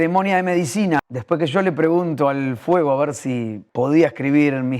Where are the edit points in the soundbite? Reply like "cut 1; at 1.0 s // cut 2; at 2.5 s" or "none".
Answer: cut 1; at 1.1 s // cut 2; at 3.6 s